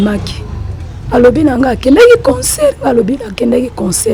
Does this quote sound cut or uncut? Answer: uncut